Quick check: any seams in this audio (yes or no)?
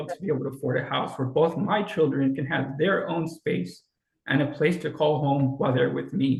no